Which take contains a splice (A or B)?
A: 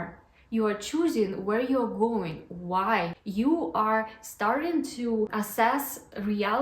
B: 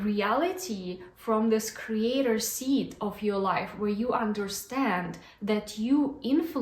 A